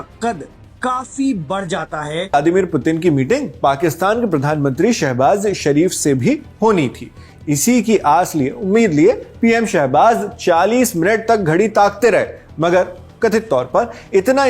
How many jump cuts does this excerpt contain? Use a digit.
1